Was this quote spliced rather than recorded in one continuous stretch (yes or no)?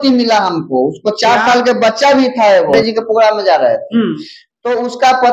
yes